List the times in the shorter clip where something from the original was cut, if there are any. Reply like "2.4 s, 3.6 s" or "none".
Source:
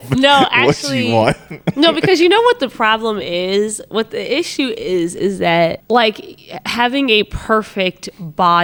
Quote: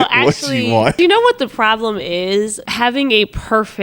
1.0 s, 2.6 s